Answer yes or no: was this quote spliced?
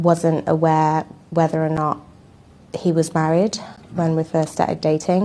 no